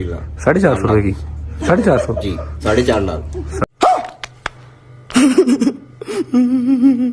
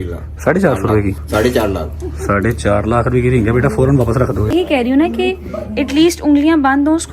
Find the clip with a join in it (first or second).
second